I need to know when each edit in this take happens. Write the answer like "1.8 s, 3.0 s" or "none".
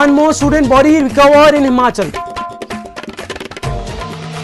none